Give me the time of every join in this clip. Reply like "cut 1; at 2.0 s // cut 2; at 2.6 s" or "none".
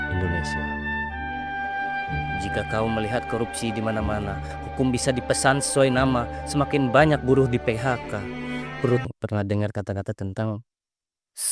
cut 1; at 9.1 s

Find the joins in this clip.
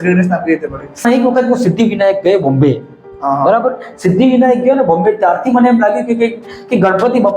cut 1; at 1.0 s

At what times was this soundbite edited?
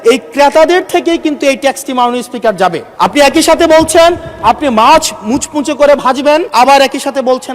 cut 1; at 2.8 s // cut 2; at 6.5 s

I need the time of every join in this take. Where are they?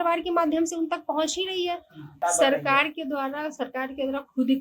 cut 1; at 2.2 s

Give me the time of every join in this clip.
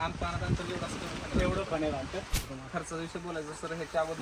cut 1; at 2.3 s

